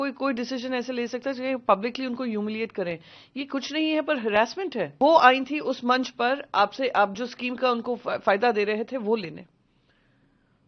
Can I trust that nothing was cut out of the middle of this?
no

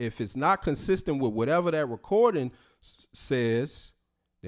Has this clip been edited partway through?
no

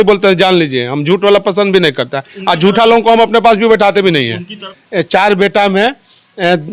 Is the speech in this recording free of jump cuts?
no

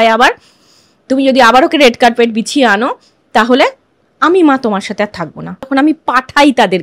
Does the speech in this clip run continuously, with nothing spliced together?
no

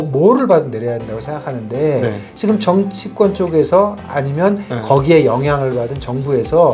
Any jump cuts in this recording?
no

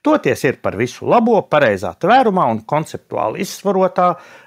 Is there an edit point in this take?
no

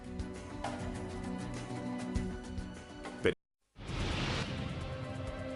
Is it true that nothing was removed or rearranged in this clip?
yes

